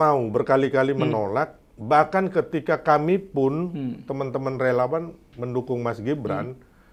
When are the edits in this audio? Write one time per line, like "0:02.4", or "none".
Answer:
none